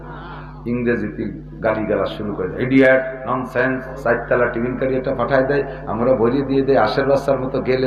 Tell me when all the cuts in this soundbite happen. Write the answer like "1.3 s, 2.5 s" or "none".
3.9 s